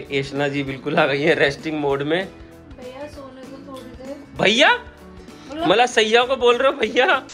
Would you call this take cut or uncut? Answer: uncut